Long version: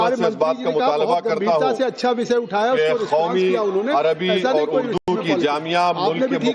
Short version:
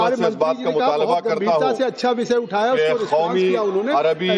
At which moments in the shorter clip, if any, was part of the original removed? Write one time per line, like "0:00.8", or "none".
none

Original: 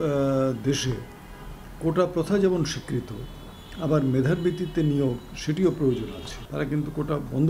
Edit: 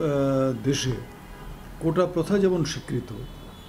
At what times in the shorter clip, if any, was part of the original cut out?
none

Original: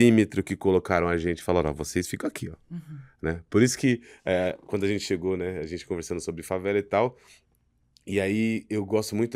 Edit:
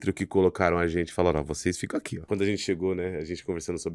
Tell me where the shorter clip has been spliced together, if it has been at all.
0:02.2

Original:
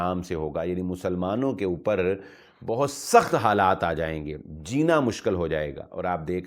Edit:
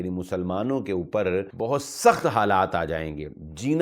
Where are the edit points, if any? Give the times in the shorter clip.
0:01.5

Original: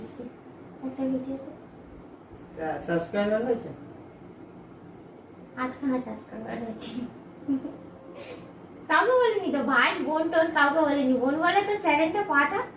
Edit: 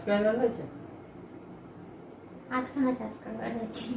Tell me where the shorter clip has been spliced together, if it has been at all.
none

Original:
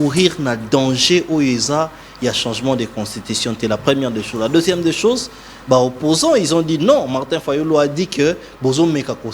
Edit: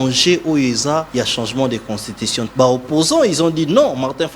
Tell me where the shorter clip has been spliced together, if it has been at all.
0:01.1
0:02.4

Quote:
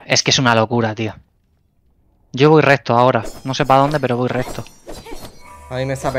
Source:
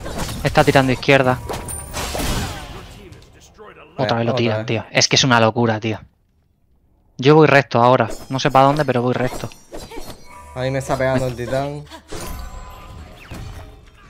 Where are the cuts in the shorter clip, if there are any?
none

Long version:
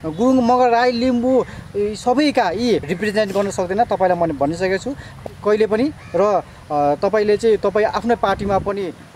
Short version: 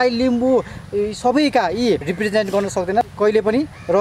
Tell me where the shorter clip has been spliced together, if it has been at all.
0:03.1

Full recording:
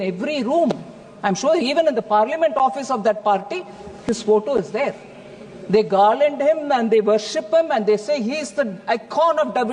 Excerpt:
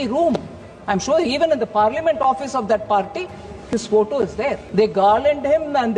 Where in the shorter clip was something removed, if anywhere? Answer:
0:04.6

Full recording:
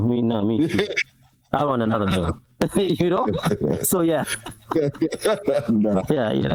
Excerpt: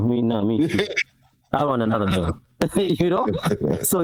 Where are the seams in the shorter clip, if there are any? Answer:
none

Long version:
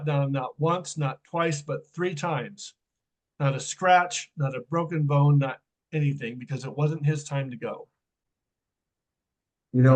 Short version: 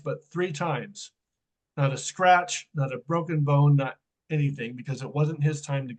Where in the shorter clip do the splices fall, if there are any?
none

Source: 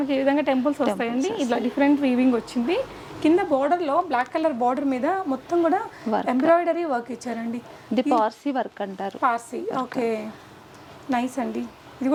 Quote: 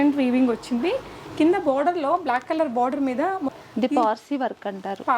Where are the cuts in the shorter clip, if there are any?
0:03.6

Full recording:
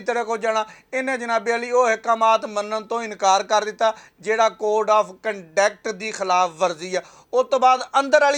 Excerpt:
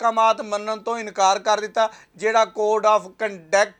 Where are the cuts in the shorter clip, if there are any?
none

